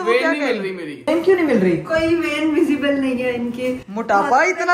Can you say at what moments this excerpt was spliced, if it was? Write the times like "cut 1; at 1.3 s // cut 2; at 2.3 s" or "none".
cut 1; at 0.9 s